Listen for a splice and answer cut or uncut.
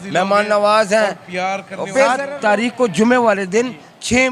cut